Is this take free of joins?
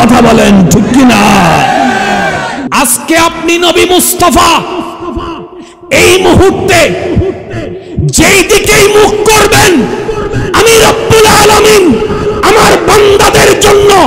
no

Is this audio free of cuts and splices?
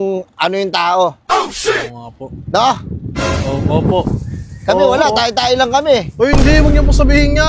yes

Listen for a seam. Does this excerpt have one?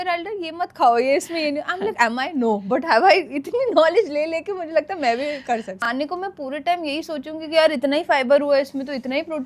yes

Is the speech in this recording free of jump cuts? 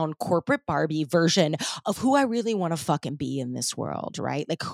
yes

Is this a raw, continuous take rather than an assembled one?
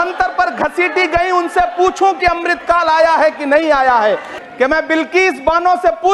no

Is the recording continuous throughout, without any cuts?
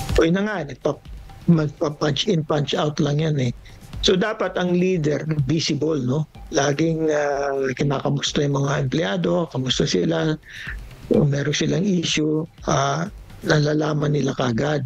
yes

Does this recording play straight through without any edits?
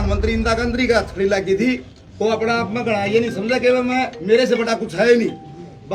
yes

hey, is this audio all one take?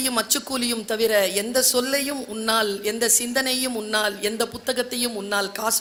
yes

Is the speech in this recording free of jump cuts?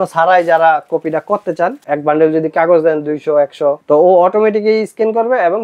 no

